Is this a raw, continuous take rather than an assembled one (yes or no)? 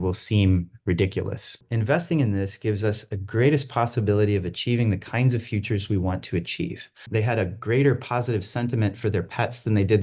no